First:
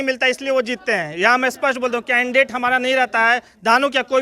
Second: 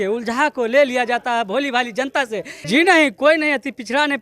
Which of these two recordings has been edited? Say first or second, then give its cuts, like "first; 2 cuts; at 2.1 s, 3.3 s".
second; 1 cut; at 2.5 s